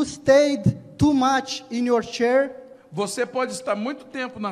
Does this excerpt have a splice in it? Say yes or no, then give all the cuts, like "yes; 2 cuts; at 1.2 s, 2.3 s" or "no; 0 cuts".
no; 0 cuts